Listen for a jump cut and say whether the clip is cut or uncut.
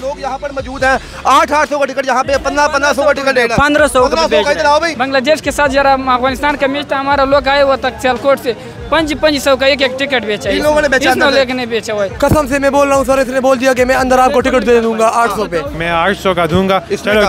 cut